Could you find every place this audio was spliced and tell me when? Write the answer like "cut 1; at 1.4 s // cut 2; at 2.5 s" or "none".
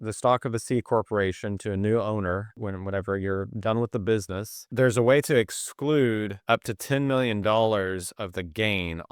cut 1; at 2.5 s // cut 2; at 4.7 s // cut 3; at 6.3 s